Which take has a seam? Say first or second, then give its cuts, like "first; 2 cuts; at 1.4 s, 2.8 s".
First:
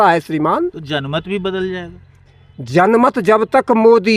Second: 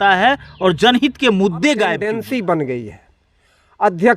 second; 1 cut; at 2.0 s